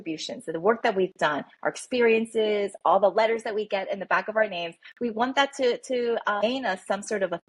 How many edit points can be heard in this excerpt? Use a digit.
1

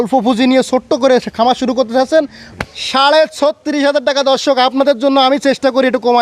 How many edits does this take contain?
1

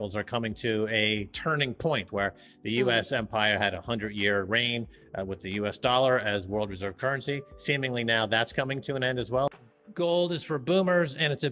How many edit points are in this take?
2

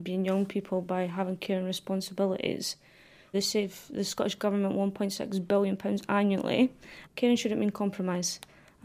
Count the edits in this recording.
2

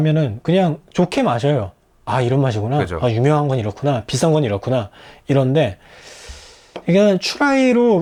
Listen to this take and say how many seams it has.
0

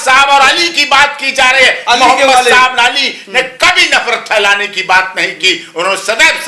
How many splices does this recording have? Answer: 0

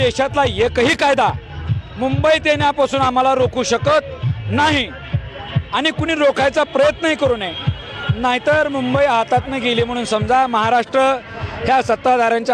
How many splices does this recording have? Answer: 0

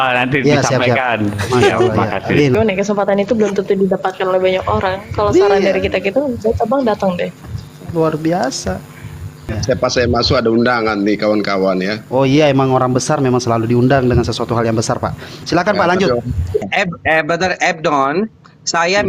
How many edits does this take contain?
3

